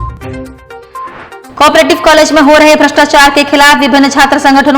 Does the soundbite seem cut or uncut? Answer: cut